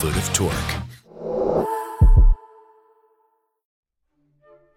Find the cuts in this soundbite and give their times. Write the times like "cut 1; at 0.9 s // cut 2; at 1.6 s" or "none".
cut 1; at 3.5 s